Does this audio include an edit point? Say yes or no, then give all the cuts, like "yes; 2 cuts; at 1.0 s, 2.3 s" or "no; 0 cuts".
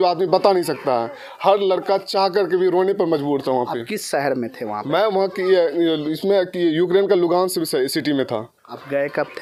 no; 0 cuts